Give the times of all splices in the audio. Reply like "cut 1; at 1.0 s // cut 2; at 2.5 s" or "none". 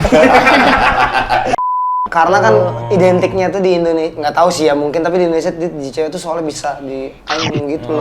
cut 1; at 1.6 s